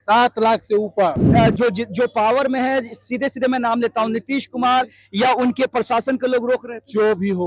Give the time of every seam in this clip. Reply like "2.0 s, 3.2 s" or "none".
1.2 s